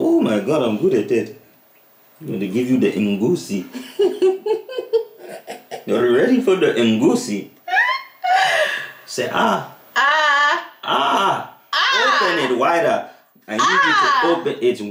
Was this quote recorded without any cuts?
yes; 0 cuts

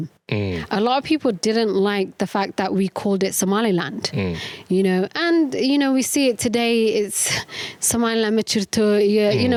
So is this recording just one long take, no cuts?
yes; 0 cuts

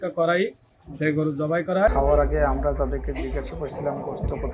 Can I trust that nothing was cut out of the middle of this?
no; 1 cut; at 1.9 s

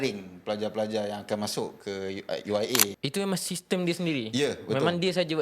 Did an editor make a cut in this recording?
yes; 1 cut; at 2.9 s

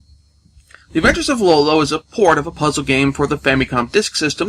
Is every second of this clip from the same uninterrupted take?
no; 1 cut; at 2.0 s

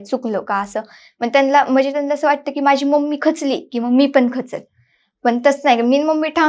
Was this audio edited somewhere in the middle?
no; 0 cuts

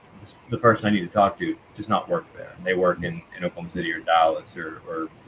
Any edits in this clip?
no; 0 cuts

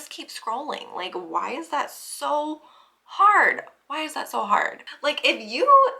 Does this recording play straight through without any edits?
no; 1 cut; at 4.8 s

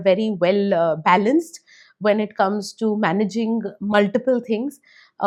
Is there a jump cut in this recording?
no; 0 cuts

